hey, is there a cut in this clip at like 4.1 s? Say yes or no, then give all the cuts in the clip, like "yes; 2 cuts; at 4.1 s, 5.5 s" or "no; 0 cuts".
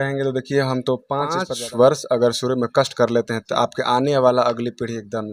no; 1 cut; at 1.5 s